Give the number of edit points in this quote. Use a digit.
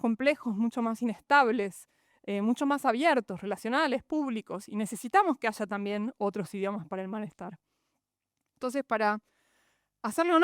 0